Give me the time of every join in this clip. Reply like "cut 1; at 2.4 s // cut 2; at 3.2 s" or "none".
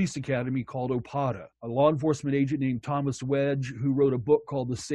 cut 1; at 1.5 s